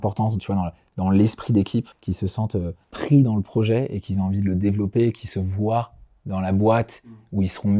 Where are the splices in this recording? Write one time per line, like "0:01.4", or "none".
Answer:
0:02.0
0:02.8